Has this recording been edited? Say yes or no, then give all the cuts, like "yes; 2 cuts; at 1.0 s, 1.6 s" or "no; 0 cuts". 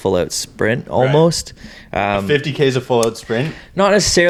no; 0 cuts